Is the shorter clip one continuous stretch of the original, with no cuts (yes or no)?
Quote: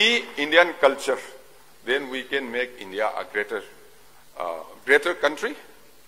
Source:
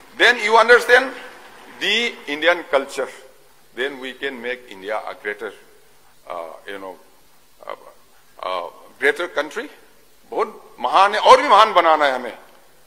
no